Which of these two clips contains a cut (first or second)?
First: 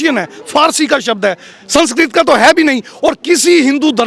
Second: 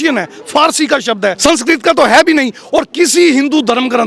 second